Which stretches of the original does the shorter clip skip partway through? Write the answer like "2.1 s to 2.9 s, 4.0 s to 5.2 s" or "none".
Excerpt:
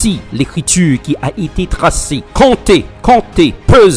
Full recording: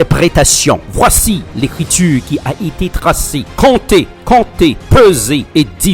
none